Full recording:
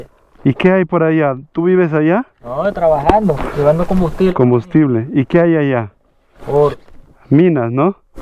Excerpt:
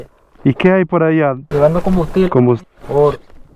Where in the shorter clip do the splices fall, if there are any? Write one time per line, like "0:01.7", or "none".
0:01.4
0:02.6

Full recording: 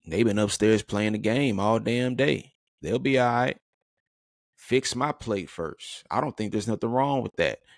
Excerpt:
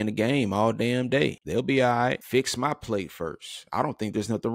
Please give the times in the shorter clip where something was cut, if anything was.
0:01.4
0:02.2

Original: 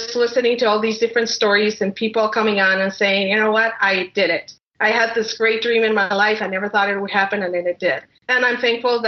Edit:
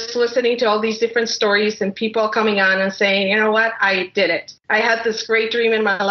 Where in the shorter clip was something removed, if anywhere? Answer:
0:04.5

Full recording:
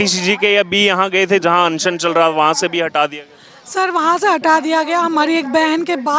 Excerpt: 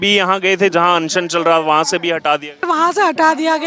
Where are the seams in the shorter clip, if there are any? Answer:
0:02.6

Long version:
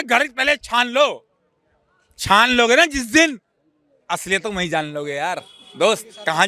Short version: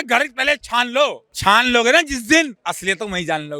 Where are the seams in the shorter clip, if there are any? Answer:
0:01.3
0:02.6

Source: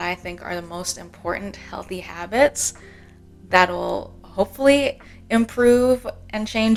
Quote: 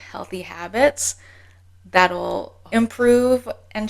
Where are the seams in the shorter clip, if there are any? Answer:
0:02.5

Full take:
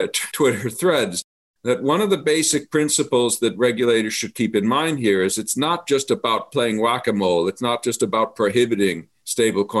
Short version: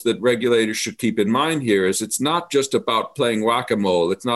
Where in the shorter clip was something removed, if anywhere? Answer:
none

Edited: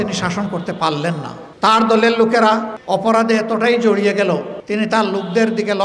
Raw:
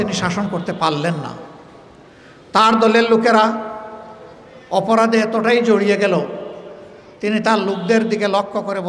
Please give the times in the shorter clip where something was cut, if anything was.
0:01.4
0:02.7
0:04.5

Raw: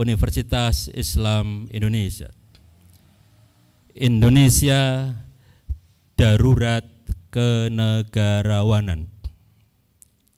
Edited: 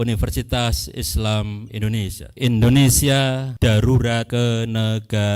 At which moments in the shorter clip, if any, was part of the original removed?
0:02.2
0:03.5
0:04.3

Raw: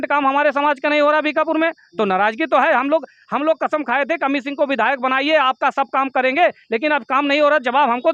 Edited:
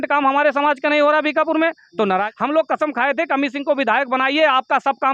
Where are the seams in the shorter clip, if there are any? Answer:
0:02.3

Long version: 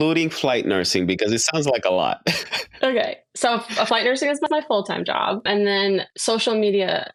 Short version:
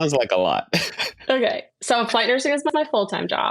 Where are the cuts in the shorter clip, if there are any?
0:02.1

